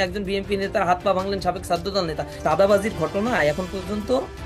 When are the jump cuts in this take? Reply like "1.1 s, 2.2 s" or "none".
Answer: 2.3 s